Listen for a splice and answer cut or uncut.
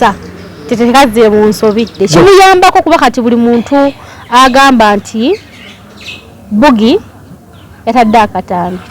cut